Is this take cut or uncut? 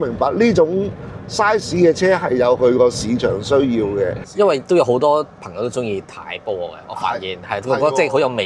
cut